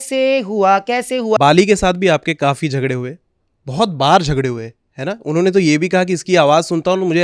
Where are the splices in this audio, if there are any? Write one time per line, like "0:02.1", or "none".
0:01.4